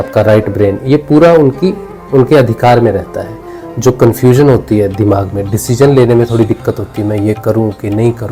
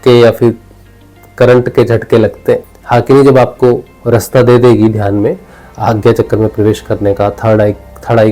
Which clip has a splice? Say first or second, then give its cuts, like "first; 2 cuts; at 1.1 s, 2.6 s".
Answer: second; 1 cut; at 2.7 s